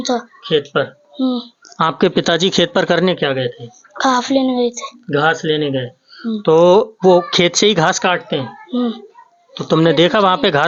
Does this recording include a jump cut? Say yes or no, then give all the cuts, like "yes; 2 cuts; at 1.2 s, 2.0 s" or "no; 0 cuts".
no; 0 cuts